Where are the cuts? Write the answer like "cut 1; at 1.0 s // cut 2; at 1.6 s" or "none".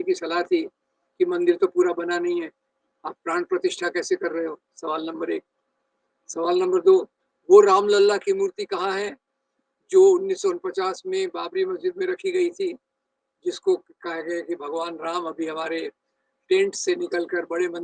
none